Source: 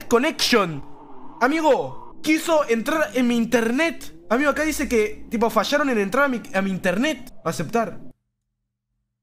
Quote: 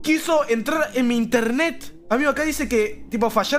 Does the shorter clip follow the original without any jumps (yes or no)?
yes